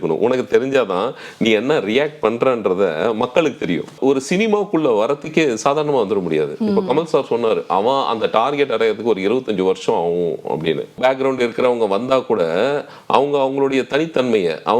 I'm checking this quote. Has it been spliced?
yes; 2 cuts; at 3.9 s, 11.0 s

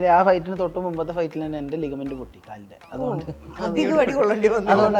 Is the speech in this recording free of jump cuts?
yes; 0 cuts

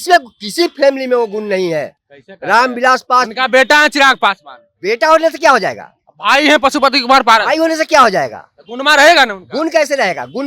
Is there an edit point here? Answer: no; 0 cuts

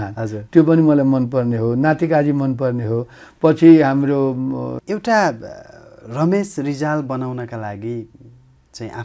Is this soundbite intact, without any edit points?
no; 1 cut; at 4.8 s

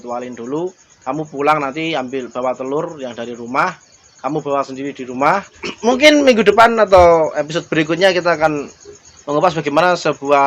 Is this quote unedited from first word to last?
no; 1 cut; at 5.6 s

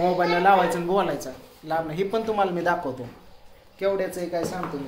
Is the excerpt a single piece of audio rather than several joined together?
yes; 0 cuts

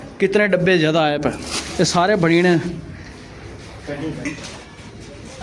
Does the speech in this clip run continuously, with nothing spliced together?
no; 1 cut; at 4.3 s

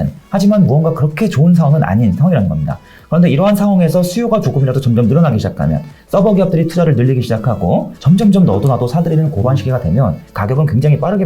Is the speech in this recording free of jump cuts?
no; 2 cuts; at 7.9 s, 10.3 s

